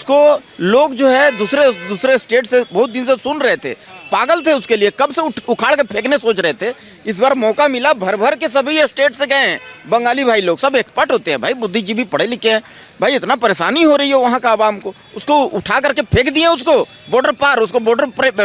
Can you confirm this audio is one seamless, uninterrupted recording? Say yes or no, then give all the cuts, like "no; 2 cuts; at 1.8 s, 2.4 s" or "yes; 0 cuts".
yes; 0 cuts